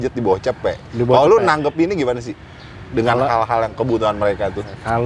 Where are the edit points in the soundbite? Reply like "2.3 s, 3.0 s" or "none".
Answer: none